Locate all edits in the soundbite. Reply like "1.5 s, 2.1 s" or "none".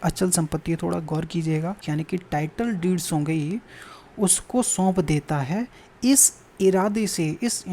1.8 s